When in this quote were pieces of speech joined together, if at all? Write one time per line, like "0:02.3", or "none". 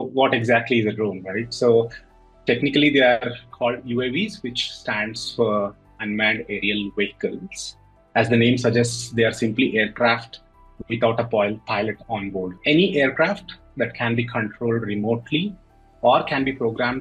none